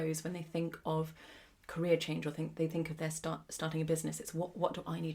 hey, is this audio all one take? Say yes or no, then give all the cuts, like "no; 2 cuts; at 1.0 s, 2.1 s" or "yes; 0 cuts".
yes; 0 cuts